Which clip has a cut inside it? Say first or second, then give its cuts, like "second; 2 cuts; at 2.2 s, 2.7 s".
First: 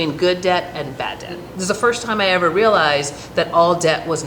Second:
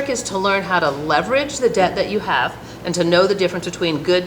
first; 1 cut; at 1.4 s